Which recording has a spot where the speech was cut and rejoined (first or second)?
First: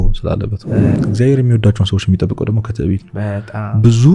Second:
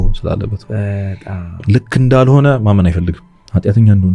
first